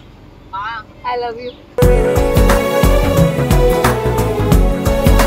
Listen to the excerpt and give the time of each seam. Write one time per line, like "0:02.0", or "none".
none